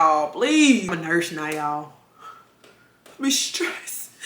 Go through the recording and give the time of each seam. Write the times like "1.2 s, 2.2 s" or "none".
0.9 s